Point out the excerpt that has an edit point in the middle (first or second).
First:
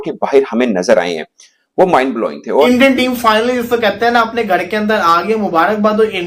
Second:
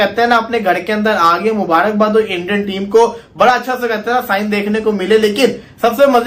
first